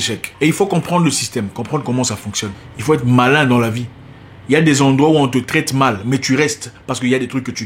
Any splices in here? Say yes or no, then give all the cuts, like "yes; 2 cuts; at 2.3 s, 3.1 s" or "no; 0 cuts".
yes; 1 cut; at 2.6 s